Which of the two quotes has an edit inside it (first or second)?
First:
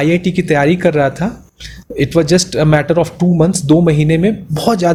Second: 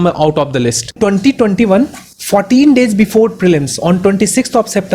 second